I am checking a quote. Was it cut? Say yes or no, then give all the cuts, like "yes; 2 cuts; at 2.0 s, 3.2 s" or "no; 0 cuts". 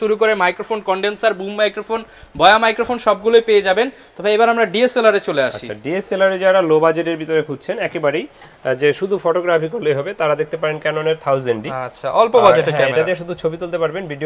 no; 0 cuts